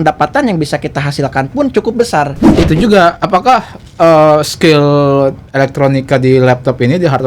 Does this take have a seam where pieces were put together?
yes; 1 cut; at 2.5 s

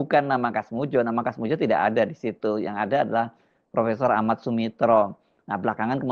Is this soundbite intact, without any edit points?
yes; 0 cuts

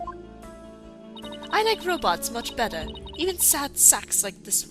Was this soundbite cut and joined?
no; 0 cuts

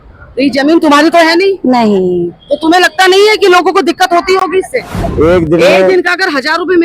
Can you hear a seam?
yes; 1 cut; at 5.0 s

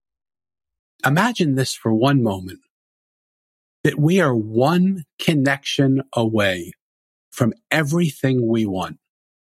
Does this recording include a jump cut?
yes; 1 cut; at 0.9 s

